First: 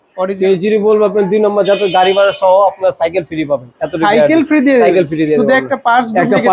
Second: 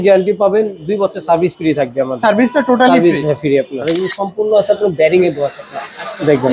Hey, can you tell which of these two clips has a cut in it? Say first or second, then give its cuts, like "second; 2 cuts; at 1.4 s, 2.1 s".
second; 1 cut; at 3.8 s